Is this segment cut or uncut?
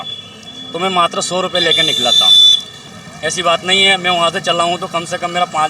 cut